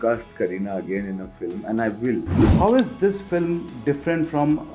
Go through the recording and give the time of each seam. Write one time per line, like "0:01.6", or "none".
0:02.4

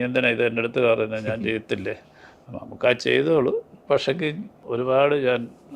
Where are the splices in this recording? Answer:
0:04.6

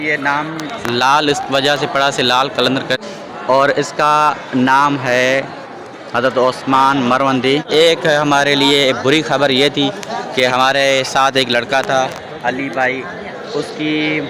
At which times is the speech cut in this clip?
0:03.0
0:07.7

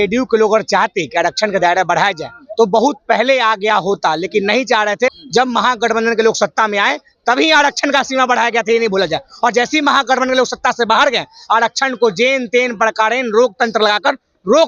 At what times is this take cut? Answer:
0:05.1

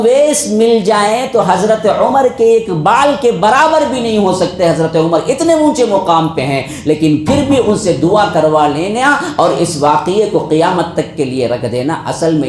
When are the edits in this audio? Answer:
none

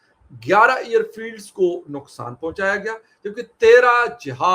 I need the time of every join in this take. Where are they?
none

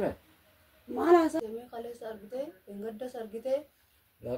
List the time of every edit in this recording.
0:01.4

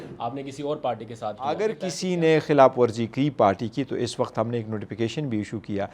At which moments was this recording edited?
0:01.6

